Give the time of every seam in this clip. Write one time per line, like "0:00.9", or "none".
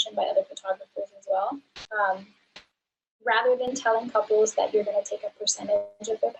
none